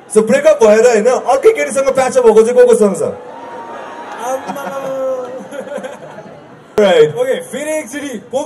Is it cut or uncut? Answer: cut